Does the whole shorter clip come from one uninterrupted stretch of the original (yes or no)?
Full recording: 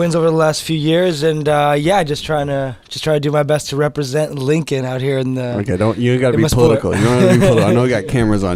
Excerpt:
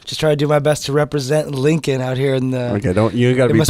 yes